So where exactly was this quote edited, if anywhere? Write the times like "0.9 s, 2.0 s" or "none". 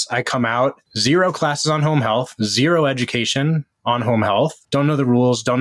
0.9 s, 4.6 s